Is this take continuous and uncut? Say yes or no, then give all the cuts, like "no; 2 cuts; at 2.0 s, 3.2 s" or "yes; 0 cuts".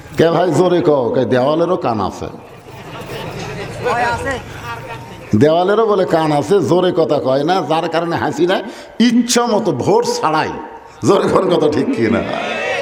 yes; 0 cuts